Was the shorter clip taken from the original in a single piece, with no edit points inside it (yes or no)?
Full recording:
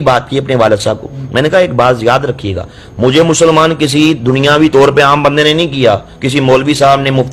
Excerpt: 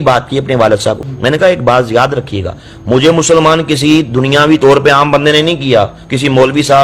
no